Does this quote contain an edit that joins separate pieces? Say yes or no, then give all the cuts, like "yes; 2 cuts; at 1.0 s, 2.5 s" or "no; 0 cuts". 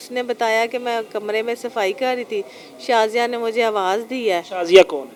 no; 0 cuts